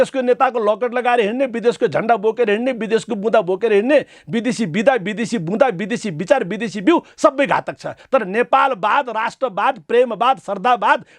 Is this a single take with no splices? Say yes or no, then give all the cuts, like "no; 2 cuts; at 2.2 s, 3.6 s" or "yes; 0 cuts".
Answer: no; 1 cut; at 8.0 s